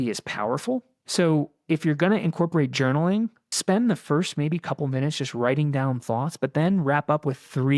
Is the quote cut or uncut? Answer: cut